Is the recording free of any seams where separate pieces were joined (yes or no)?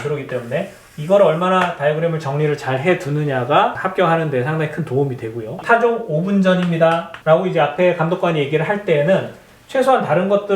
no